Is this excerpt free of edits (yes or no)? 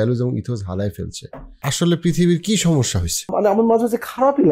no